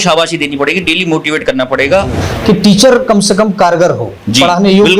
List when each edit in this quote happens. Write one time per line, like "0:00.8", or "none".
0:02.2